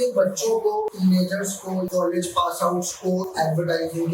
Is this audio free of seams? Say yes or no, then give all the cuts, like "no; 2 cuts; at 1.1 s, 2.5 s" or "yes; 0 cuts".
no; 2 cuts; at 0.9 s, 1.9 s